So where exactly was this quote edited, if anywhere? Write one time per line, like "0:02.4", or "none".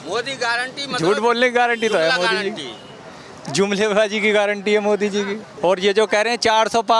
0:05.4

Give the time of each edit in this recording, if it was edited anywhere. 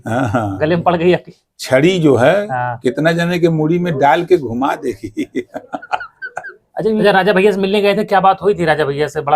0:07.0

